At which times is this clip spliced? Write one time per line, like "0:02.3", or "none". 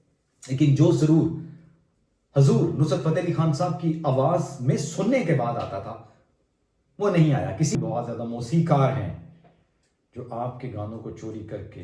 0:07.8